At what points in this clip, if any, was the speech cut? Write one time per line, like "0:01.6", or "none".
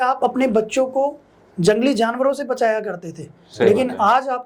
none